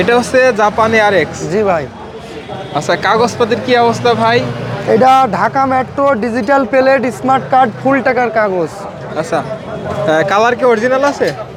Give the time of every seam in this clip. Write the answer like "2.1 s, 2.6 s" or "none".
none